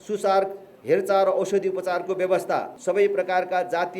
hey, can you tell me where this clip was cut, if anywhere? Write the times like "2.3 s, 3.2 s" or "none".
2.7 s